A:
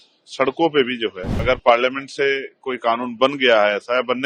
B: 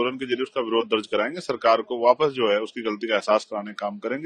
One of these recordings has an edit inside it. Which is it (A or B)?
A